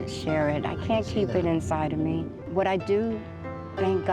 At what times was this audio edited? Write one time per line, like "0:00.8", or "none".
0:02.4